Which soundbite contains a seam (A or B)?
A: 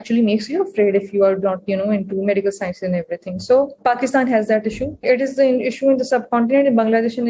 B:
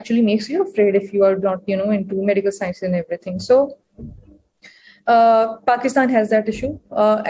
A